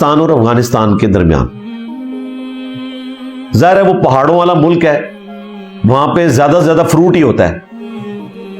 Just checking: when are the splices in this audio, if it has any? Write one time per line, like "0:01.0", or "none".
0:02.0
0:03.5